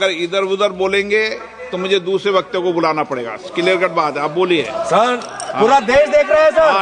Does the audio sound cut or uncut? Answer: uncut